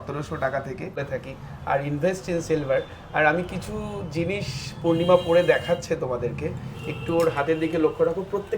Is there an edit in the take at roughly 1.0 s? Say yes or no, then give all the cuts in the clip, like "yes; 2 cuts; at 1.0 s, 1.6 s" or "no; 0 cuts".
yes; 1 cut; at 1.0 s